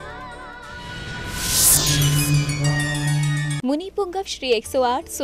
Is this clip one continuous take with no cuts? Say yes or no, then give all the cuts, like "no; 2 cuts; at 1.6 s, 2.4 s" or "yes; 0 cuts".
no; 1 cut; at 3.6 s